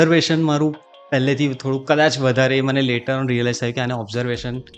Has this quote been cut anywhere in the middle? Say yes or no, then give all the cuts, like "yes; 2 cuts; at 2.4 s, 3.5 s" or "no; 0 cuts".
no; 0 cuts